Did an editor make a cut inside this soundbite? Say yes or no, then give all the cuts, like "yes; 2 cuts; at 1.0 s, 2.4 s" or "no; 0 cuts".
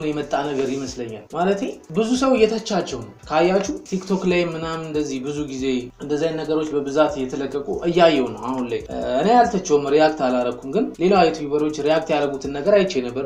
no; 0 cuts